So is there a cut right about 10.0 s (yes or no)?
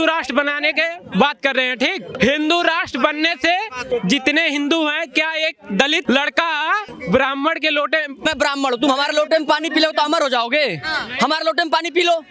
no